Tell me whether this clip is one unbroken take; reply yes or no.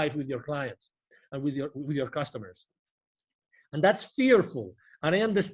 yes